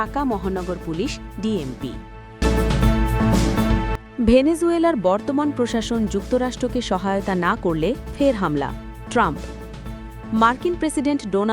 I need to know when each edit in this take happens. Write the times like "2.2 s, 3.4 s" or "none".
2.3 s, 4.0 s